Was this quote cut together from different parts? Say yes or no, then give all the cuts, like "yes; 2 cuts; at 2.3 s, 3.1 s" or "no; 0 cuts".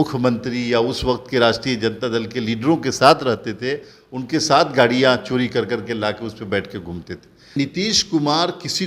yes; 1 cut; at 7.6 s